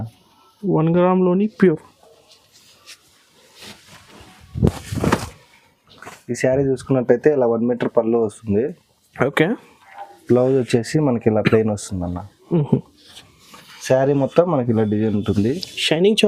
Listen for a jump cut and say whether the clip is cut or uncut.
uncut